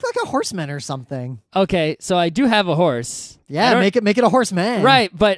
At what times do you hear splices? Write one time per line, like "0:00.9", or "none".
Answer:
none

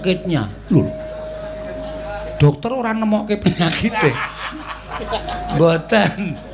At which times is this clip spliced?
0:04.9

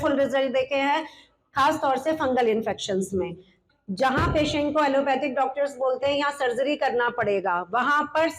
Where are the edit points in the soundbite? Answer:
0:03.6

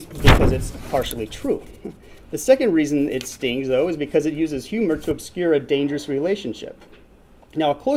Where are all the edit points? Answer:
none

